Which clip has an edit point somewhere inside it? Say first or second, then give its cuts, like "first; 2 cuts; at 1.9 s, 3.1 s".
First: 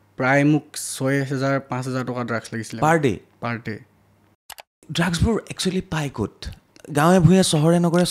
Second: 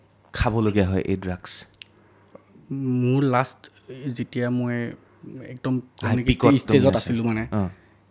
first; 1 cut; at 4.8 s